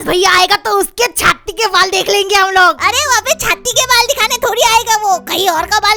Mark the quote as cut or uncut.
uncut